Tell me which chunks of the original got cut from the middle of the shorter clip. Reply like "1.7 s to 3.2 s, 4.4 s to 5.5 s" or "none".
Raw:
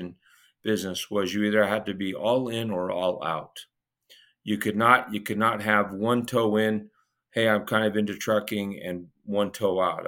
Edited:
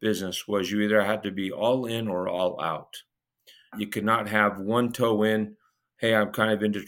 4.4 s to 5.1 s